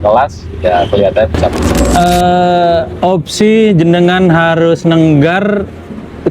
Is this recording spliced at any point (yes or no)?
yes